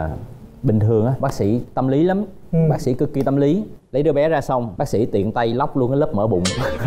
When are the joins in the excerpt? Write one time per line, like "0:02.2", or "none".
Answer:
0:01.2